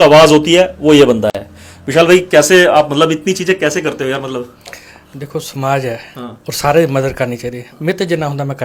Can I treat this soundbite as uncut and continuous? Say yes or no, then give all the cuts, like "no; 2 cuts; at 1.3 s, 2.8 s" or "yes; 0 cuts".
yes; 0 cuts